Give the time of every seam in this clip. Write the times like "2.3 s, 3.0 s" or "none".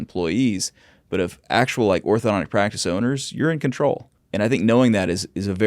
4.2 s